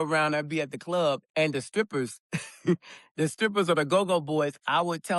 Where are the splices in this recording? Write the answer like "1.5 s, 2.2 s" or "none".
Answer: 1.2 s